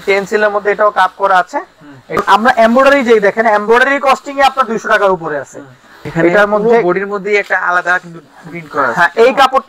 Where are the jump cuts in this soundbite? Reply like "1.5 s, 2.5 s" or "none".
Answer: 2.2 s, 6.0 s